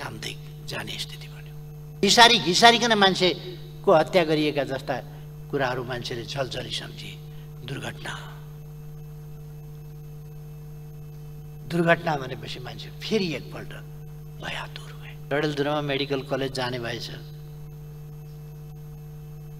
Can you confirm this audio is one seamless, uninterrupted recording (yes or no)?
no